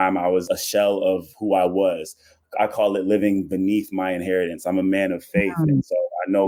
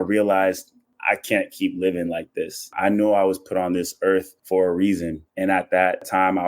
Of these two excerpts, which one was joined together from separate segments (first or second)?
second